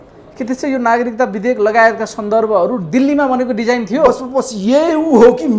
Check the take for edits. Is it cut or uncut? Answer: uncut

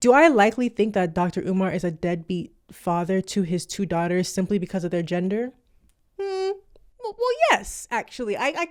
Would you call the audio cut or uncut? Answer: uncut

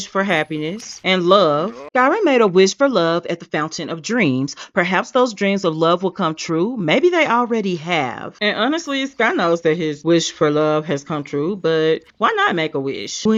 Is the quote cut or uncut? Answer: uncut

